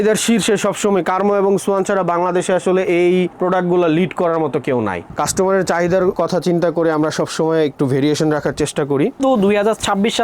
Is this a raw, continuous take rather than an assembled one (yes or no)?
no